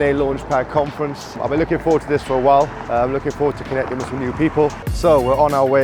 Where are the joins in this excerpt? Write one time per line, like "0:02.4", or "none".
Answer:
0:01.4
0:02.8
0:04.9